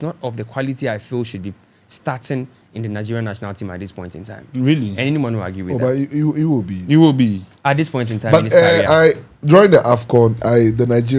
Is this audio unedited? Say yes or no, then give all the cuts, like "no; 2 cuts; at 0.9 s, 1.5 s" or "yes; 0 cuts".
yes; 0 cuts